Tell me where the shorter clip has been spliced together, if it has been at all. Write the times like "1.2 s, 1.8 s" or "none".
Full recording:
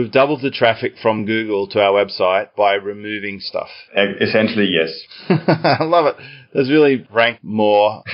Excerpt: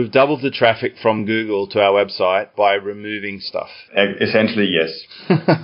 none